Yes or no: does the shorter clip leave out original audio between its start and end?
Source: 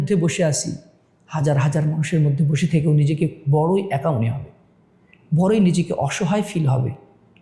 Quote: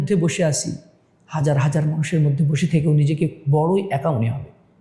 no